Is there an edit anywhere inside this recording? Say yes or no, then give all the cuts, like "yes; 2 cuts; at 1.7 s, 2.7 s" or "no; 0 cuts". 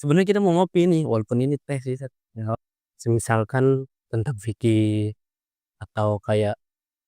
yes; 1 cut; at 2.5 s